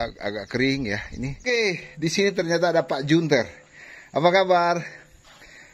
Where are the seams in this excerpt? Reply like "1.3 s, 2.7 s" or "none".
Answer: 1.4 s